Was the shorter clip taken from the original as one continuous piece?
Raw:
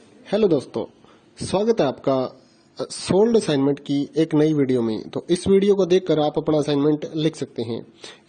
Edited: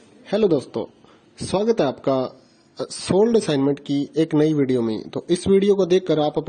yes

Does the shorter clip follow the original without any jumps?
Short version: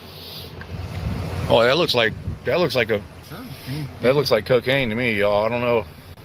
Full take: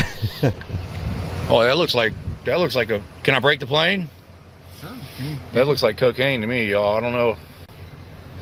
no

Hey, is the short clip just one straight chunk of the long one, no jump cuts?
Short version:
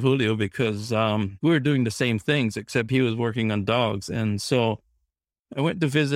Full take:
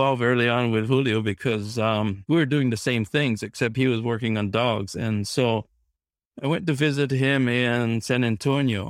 yes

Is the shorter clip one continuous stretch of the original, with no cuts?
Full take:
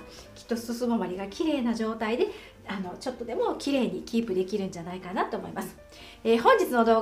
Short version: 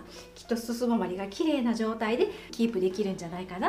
no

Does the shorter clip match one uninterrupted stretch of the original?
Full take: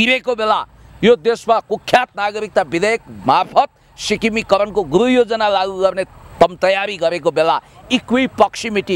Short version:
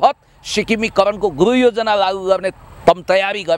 yes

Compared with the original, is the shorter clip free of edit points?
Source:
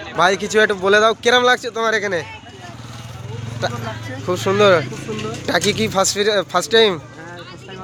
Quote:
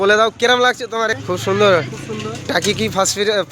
no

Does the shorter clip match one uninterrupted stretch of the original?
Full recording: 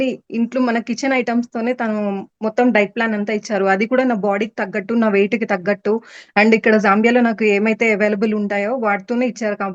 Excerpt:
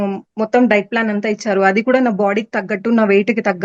yes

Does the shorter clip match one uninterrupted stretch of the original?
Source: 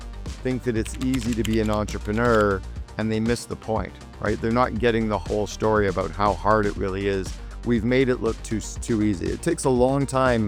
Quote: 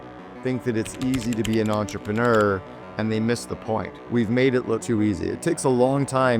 no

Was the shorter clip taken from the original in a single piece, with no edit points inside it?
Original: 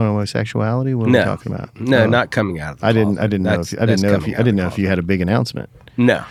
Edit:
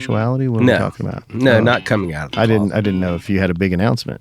no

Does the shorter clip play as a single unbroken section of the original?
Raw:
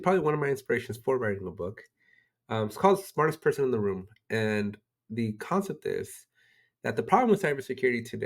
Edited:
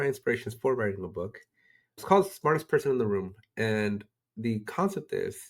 no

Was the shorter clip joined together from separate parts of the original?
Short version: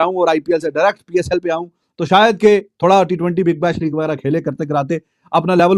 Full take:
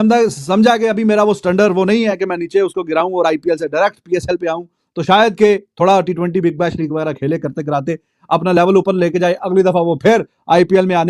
no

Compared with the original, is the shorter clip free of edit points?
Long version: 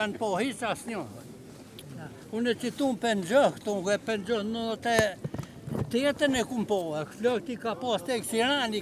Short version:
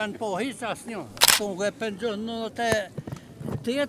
no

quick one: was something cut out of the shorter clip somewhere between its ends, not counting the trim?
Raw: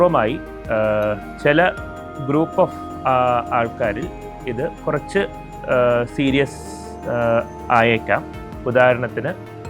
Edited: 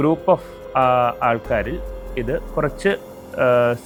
no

